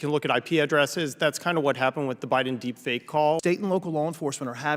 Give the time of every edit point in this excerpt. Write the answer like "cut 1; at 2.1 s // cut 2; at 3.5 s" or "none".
cut 1; at 3.4 s